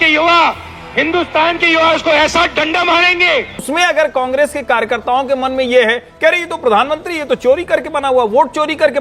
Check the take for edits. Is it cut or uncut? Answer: cut